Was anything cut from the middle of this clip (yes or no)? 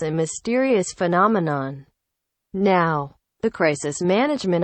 yes